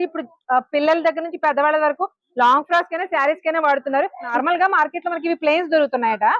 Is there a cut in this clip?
yes; 1 cut; at 4.3 s

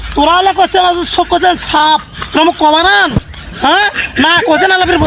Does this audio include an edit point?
no; 0 cuts

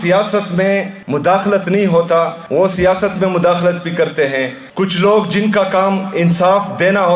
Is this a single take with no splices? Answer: no; 3 cuts; at 1.0 s, 2.4 s, 4.6 s

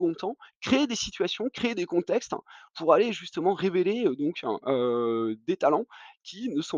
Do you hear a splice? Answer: no; 0 cuts

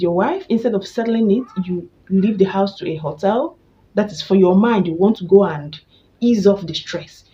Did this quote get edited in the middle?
no; 0 cuts

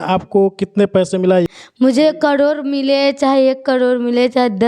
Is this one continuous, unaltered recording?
no; 1 cut; at 1.5 s

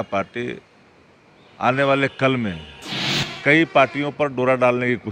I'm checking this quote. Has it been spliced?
no; 0 cuts

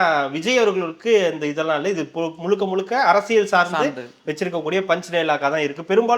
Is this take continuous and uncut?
yes; 0 cuts

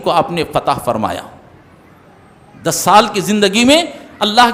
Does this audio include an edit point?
no; 0 cuts

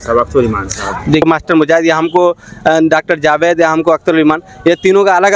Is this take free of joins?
no; 1 cut; at 1.2 s

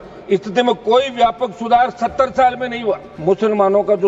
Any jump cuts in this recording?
yes; 1 cut; at 3.1 s

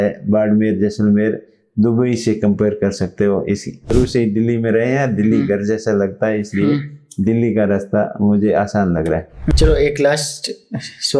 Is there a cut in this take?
yes; 2 cuts; at 3.9 s, 9.6 s

